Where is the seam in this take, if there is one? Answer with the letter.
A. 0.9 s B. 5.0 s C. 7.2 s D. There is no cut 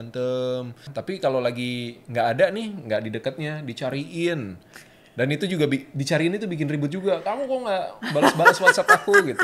A